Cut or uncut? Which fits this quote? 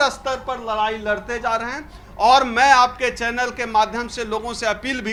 uncut